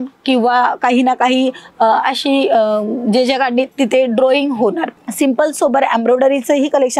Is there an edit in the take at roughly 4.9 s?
yes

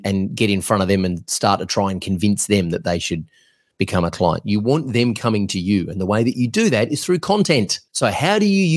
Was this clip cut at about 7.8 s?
yes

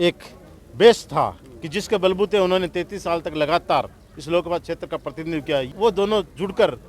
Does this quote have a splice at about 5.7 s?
yes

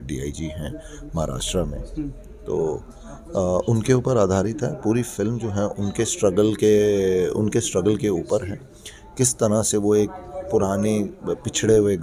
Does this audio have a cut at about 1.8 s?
no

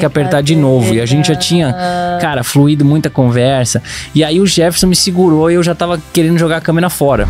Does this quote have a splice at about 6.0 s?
yes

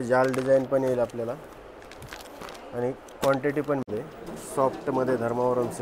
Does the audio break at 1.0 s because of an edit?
no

